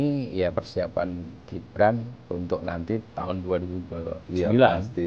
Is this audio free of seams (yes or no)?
yes